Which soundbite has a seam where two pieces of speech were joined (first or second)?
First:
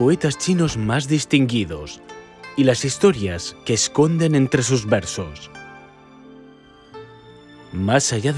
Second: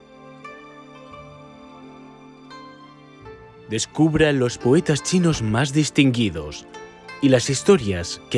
second